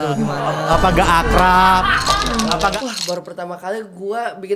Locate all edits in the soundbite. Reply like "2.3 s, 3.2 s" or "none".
2.7 s